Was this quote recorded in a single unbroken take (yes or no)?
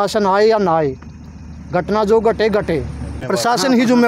no